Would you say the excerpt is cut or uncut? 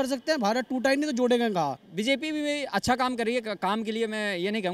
cut